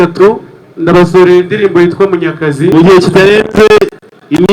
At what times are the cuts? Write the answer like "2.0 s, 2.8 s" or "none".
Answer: 2.7 s